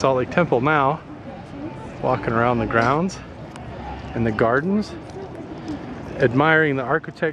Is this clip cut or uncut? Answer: uncut